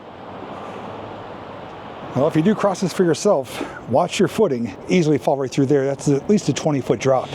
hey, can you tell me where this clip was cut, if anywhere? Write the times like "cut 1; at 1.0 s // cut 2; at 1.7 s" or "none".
cut 1; at 2.1 s // cut 2; at 4.8 s